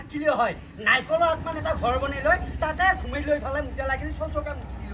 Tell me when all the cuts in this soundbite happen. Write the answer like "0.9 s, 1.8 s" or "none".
none